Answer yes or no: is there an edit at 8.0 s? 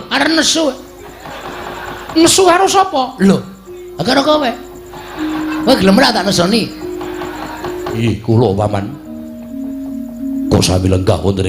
yes